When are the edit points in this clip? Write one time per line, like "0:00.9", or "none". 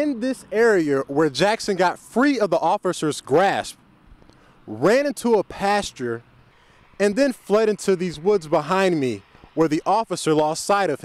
none